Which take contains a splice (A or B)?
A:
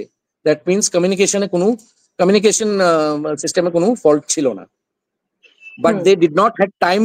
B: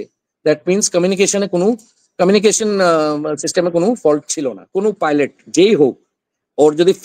B